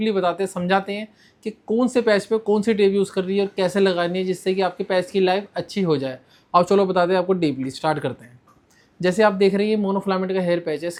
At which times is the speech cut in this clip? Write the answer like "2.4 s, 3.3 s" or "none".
none